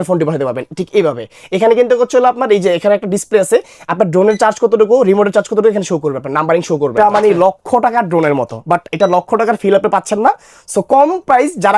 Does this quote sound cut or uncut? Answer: cut